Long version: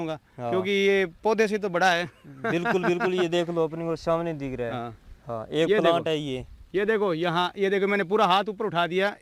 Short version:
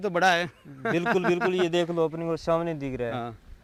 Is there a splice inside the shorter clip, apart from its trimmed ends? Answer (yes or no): no